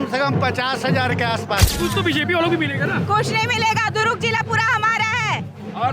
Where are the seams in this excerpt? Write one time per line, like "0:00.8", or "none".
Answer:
0:01.7